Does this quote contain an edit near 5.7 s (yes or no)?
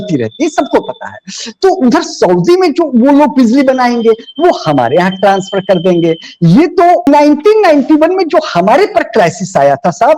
no